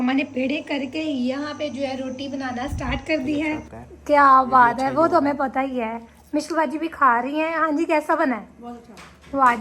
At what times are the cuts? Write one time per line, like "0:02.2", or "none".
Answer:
0:03.5